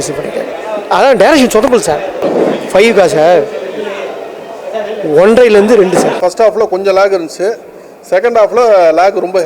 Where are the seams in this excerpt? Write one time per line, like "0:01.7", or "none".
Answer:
0:02.1
0:06.2